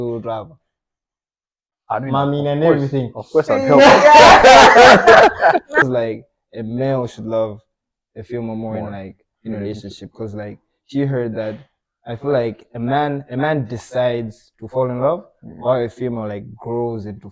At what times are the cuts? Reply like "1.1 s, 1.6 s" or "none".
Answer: 5.8 s